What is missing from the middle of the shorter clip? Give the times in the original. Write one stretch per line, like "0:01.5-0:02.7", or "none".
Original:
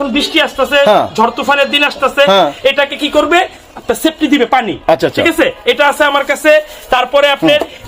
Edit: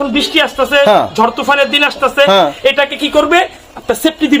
none